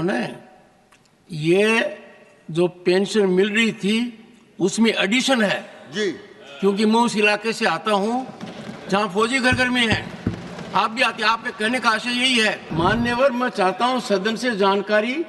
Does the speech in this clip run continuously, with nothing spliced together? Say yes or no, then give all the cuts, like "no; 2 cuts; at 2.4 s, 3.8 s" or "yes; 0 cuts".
no; 1 cut; at 12.6 s